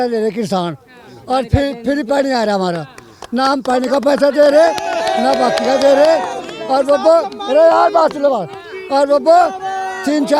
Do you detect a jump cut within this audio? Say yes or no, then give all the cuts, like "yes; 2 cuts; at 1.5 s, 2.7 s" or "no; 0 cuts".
no; 0 cuts